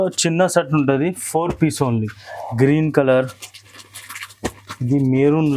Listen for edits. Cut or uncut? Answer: uncut